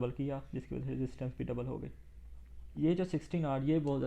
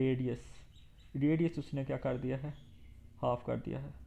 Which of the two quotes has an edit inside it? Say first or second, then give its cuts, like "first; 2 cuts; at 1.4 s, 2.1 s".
first; 1 cut; at 2.7 s